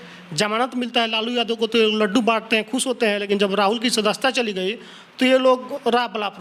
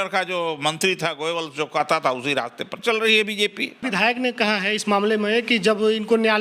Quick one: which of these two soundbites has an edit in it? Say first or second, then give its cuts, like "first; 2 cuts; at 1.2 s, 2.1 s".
second; 2 cuts; at 2.8 s, 3.8 s